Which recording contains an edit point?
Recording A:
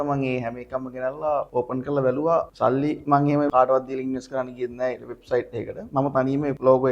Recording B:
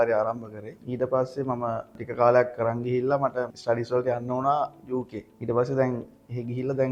A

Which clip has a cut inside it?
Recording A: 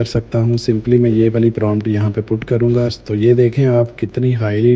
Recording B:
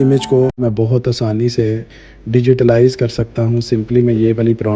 A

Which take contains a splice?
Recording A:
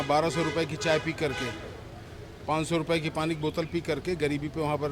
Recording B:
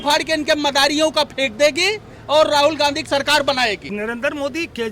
B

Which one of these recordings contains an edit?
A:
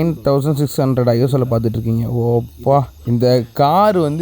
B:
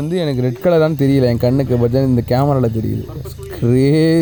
A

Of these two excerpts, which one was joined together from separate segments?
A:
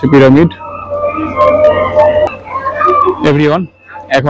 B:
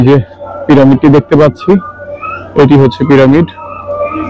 A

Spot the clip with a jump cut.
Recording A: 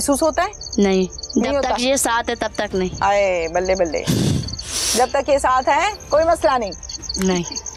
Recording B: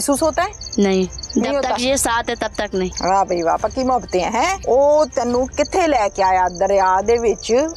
B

